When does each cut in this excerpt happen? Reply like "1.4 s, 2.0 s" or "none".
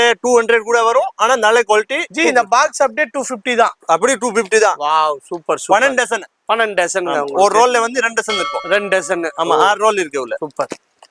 none